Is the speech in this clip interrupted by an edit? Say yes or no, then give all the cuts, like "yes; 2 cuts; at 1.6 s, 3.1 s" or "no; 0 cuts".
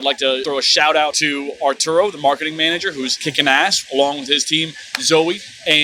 no; 0 cuts